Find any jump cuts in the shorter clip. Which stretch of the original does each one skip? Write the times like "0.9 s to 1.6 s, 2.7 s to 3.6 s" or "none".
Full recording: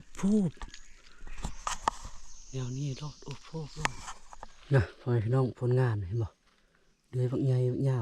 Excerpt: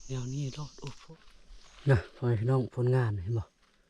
3.5 s to 3.9 s